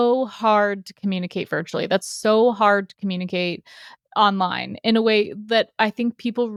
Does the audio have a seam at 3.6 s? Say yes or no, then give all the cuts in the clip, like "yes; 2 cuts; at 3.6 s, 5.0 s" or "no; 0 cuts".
no; 0 cuts